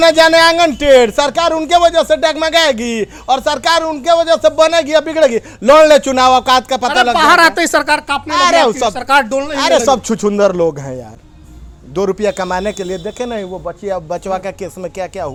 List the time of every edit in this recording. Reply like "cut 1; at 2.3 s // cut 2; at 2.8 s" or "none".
none

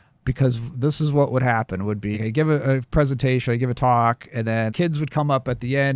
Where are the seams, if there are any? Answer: cut 1; at 2.2 s // cut 2; at 4.7 s

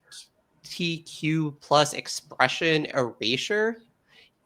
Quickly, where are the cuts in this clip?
none

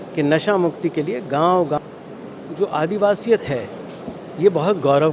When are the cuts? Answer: cut 1; at 1.8 s

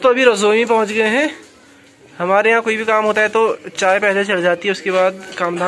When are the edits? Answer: none

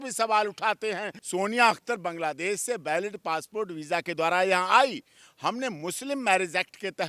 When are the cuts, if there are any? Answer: cut 1; at 1.2 s

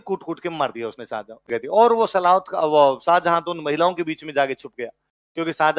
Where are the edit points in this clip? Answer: cut 1; at 1.4 s

